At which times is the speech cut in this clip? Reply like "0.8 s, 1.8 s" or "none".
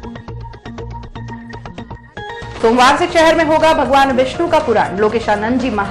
2.5 s